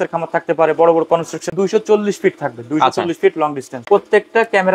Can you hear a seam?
yes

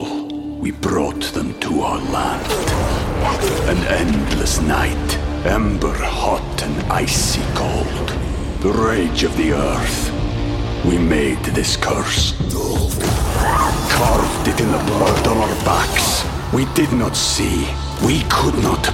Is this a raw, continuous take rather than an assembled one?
yes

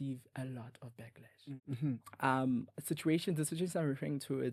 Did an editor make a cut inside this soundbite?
yes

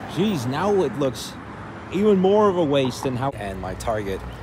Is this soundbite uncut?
no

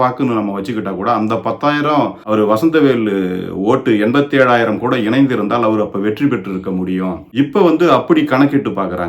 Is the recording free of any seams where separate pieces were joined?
no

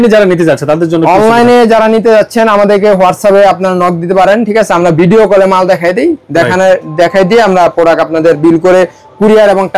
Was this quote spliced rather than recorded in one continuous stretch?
no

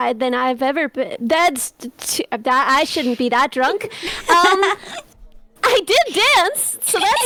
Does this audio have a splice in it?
no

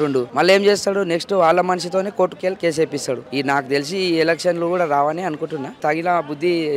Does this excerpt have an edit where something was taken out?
yes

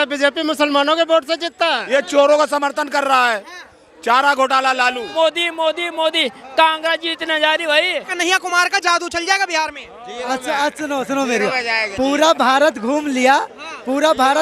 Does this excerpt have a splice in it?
yes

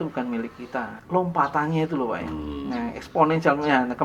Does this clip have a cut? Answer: yes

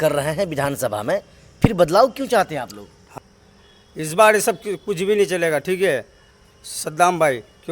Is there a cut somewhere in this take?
yes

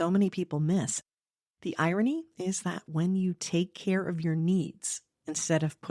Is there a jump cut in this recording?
yes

